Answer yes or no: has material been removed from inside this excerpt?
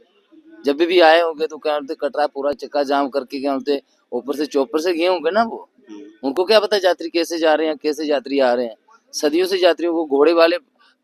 no